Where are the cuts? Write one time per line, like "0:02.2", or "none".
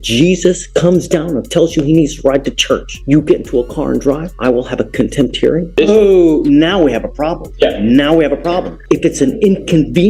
0:02.9
0:04.3
0:05.7
0:07.4
0:08.7